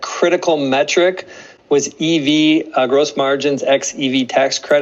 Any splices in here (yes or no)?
no